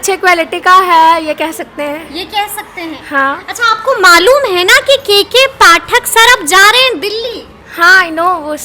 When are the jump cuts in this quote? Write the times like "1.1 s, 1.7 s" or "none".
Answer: none